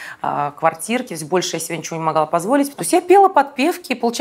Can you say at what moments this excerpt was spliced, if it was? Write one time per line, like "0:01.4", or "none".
0:02.8